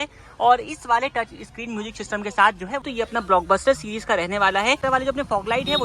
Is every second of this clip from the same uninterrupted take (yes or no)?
no